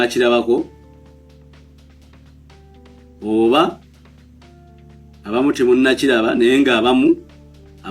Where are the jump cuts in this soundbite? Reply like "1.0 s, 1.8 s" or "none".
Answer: 3.8 s, 5.2 s